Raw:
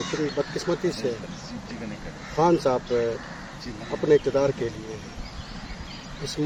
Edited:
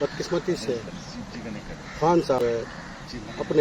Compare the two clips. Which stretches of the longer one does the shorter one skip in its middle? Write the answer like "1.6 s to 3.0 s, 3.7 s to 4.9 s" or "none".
2.8 s to 2.9 s